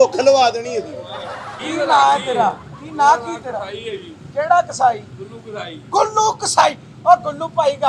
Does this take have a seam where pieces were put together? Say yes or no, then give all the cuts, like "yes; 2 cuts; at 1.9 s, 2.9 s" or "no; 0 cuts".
no; 0 cuts